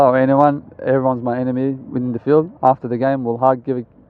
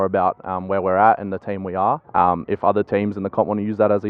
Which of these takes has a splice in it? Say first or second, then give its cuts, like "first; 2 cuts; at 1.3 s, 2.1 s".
second; 1 cut; at 2.0 s